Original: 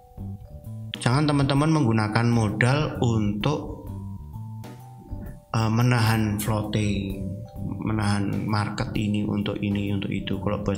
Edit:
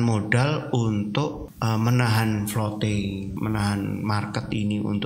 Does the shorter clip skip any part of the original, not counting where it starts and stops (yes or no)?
yes